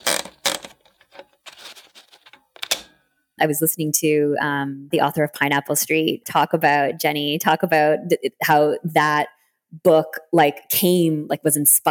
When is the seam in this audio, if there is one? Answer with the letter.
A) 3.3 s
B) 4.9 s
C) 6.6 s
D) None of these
A